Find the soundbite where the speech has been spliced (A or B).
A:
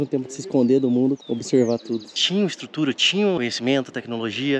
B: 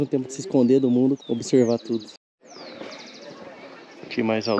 A